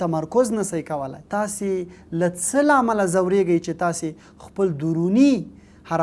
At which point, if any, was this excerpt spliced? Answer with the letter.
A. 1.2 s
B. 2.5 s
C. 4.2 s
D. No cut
A